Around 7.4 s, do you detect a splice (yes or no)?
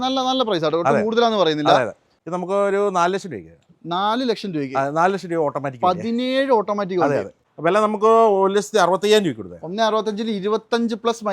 yes